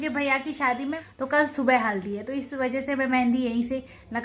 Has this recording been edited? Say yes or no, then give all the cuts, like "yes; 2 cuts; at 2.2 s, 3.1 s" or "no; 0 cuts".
yes; 1 cut; at 0.9 s